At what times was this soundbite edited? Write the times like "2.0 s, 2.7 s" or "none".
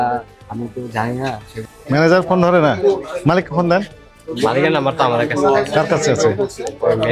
1.5 s

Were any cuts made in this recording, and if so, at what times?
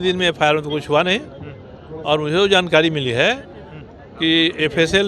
none

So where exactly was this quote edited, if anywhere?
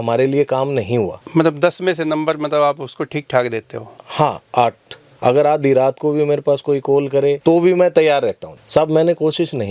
5.1 s, 8.4 s

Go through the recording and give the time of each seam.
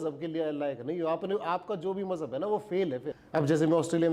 3.1 s

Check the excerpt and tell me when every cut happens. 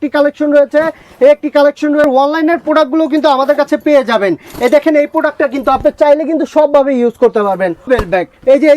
2.0 s, 7.9 s

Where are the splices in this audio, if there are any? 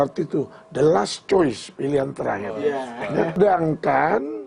3.4 s

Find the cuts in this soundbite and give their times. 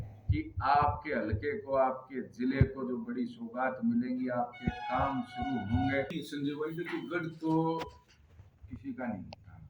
6.1 s

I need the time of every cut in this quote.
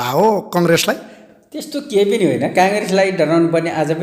none

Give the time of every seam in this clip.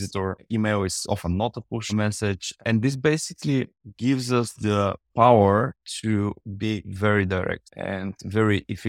1.9 s, 7.7 s

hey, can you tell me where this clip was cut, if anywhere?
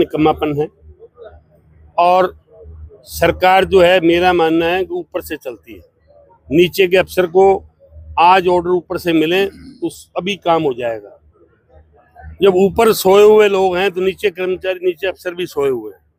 none

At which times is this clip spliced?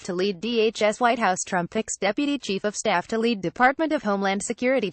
0.9 s

